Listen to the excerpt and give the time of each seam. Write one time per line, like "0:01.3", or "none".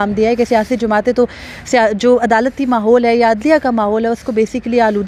none